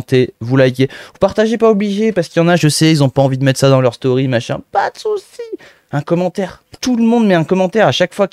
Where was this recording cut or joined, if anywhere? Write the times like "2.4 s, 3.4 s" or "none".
6.7 s